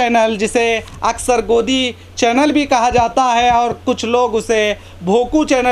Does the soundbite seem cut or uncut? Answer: uncut